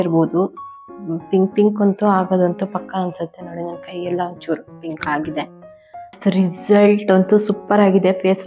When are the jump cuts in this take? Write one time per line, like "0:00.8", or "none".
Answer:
0:05.5